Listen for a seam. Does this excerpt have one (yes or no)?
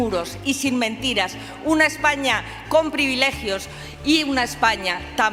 no